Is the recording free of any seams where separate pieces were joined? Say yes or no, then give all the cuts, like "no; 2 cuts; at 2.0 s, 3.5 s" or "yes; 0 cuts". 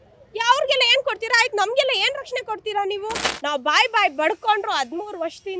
no; 1 cut; at 3.3 s